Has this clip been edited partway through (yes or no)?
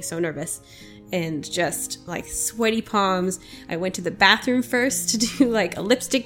no